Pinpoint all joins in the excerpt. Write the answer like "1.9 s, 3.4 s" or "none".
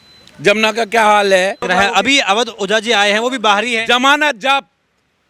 1.6 s